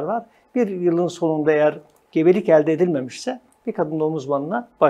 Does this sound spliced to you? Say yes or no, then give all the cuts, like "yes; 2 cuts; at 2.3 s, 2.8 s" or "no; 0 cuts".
no; 0 cuts